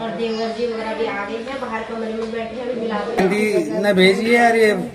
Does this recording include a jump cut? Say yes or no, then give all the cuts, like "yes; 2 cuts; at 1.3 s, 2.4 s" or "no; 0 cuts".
yes; 1 cut; at 3.2 s